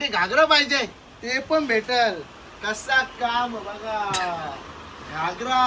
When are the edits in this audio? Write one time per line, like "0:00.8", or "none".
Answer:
none

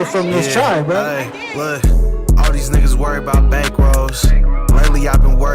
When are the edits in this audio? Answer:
0:01.6

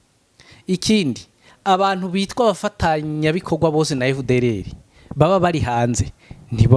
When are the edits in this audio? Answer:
none

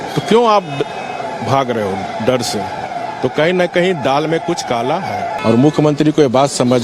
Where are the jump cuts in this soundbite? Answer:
0:05.4

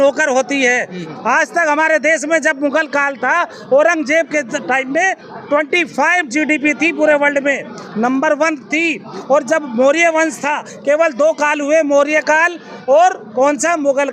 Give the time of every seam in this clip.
0:01.0

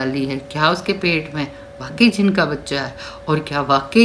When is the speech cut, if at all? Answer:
none

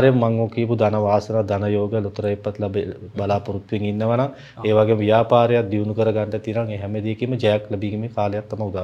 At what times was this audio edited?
none

